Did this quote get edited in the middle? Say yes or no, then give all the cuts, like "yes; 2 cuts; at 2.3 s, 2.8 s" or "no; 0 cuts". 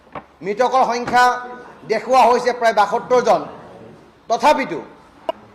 no; 0 cuts